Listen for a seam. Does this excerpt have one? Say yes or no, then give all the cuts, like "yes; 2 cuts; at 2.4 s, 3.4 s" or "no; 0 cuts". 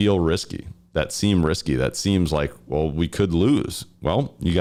no; 0 cuts